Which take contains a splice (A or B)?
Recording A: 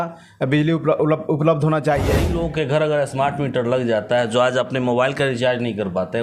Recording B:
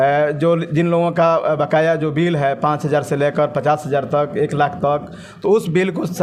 A